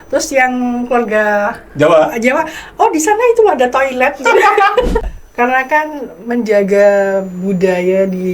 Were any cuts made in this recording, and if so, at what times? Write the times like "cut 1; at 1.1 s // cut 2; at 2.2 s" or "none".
cut 1; at 5.2 s

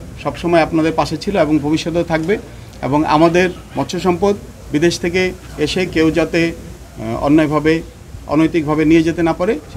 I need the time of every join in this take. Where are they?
none

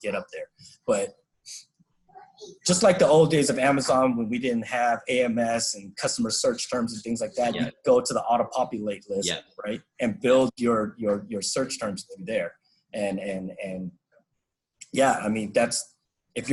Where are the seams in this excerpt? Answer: none

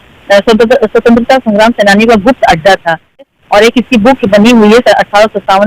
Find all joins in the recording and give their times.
cut 1; at 3.3 s

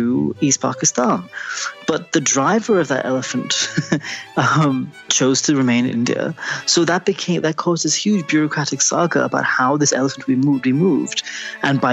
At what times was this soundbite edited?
none

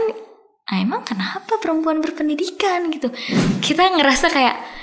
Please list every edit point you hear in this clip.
cut 1; at 3.3 s

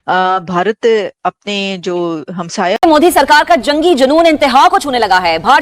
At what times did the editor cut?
cut 1; at 2.8 s

